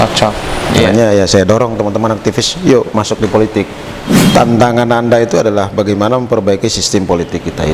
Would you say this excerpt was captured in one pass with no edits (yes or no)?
no